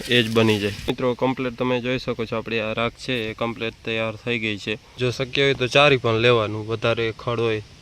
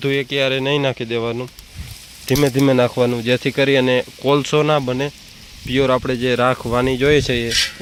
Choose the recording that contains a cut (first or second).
first